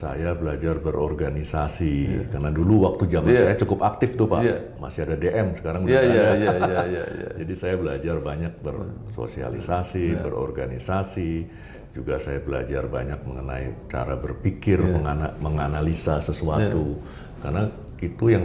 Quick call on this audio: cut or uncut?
uncut